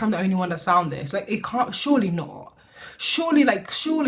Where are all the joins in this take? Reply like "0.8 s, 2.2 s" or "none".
none

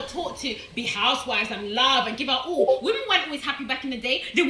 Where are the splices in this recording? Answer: none

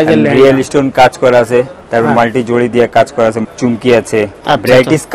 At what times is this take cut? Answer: 3.4 s, 4.4 s

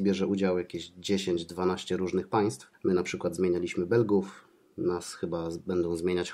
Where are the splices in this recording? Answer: 2.7 s

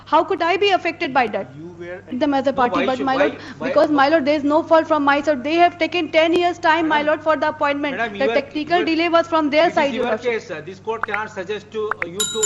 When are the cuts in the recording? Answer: 2.2 s

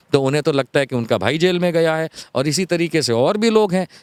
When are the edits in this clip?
none

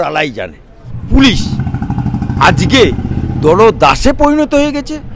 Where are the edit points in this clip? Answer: 0.9 s

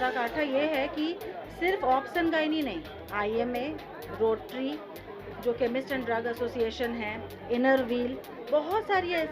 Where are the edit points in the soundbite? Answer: none

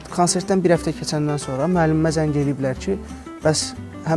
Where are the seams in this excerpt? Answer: none

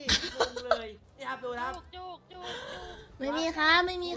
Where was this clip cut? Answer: 1.1 s

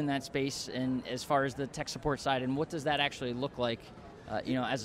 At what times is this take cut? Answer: none

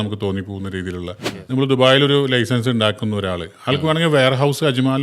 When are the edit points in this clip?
1.3 s

